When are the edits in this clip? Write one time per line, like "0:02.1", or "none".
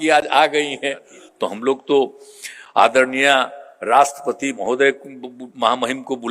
0:01.3